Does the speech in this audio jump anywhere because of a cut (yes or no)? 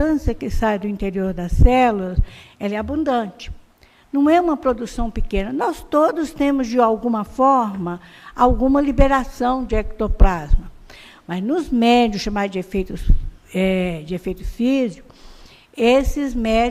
yes